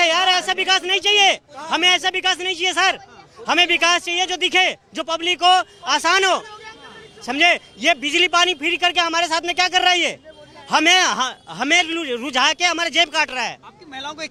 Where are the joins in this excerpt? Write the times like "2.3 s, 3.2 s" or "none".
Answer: none